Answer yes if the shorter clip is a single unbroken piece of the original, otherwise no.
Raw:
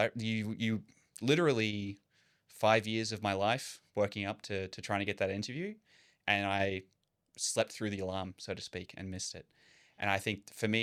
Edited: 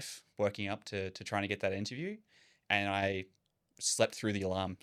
yes